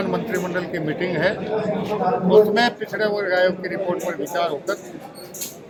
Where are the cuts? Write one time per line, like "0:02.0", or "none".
none